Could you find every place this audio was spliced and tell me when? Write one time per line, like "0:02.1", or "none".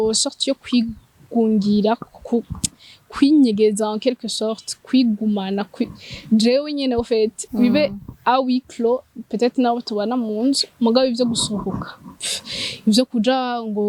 none